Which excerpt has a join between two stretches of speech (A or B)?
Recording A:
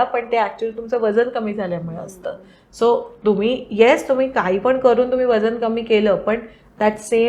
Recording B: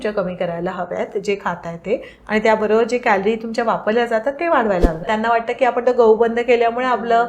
B